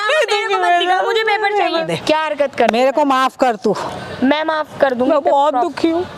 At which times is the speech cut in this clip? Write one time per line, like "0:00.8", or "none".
0:01.8